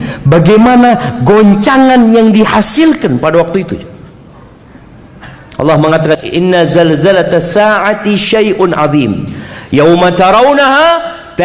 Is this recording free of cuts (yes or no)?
no